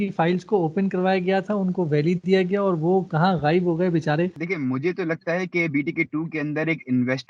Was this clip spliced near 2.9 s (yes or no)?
no